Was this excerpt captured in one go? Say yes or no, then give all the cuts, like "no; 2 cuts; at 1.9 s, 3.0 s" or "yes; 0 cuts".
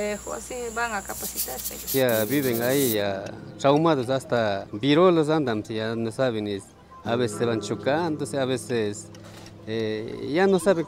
no; 1 cut; at 1.9 s